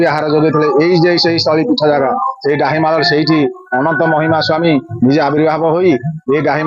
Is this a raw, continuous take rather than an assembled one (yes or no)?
yes